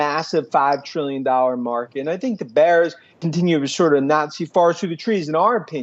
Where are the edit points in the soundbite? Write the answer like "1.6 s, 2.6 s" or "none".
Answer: 3.1 s